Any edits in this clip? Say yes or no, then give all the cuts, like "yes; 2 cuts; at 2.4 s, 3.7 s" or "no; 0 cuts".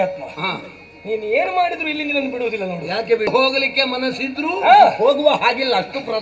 yes; 1 cut; at 3.3 s